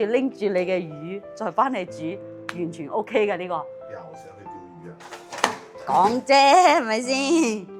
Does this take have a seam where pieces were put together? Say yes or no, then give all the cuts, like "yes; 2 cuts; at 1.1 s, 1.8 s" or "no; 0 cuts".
no; 0 cuts